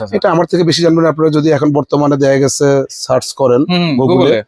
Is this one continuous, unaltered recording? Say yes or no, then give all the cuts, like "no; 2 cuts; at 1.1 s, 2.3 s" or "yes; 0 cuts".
yes; 0 cuts